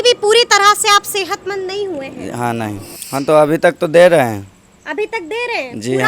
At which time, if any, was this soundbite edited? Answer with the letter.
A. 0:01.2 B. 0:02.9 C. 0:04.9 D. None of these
B